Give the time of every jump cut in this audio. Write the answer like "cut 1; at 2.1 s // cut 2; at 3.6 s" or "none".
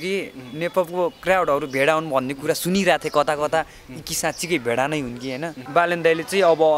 cut 1; at 5.6 s